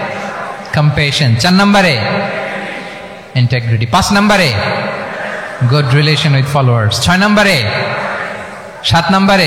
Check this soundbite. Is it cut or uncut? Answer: uncut